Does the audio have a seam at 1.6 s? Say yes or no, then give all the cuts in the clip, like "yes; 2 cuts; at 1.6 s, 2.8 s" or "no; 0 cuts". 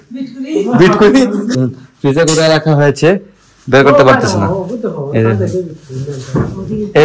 yes; 1 cut; at 1.6 s